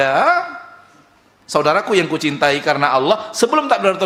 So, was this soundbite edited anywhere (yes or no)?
no